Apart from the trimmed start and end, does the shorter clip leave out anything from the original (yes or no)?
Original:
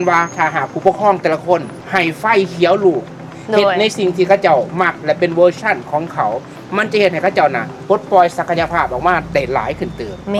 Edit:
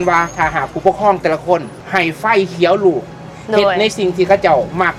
no